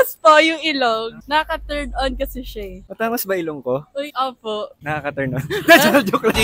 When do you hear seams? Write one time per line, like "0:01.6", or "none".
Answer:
0:02.8
0:04.8

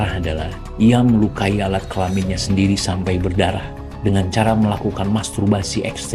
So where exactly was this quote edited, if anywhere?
none

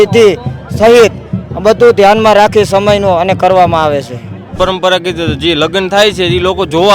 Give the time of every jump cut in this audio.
0:04.6

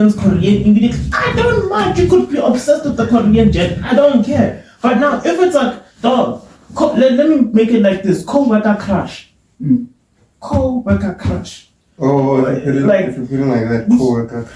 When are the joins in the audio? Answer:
none

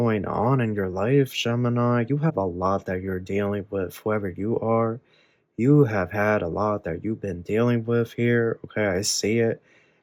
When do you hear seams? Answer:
none

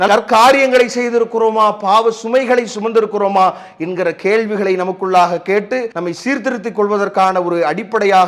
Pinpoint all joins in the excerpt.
0:05.9

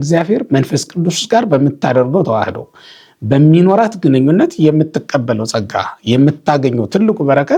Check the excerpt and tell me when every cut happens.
none

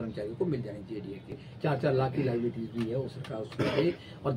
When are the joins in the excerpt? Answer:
0:01.4

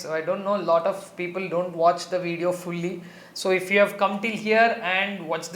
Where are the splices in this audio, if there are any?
none

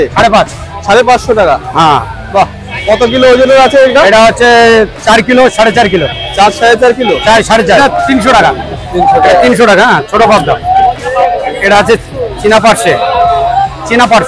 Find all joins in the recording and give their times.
0:07.8
0:11.6

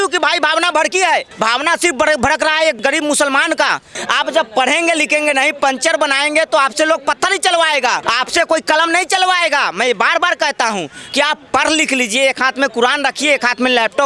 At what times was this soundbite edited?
0:01.3
0:02.8
0:03.9
0:08.0

